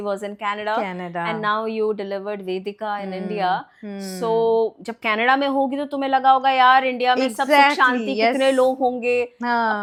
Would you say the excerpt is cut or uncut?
uncut